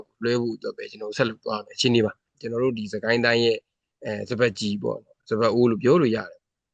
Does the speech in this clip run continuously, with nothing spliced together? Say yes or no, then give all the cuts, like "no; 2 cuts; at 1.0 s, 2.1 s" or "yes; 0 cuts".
no; 1 cut; at 2.4 s